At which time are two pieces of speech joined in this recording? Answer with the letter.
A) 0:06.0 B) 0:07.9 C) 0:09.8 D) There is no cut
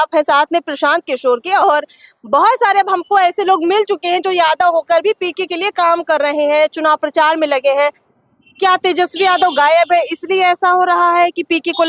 D